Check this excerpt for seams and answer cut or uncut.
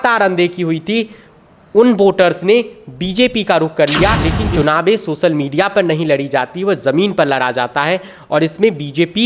cut